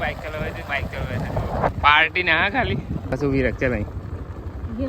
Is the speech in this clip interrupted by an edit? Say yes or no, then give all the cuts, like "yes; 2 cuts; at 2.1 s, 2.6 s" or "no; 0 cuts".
yes; 2 cuts; at 1.7 s, 3.1 s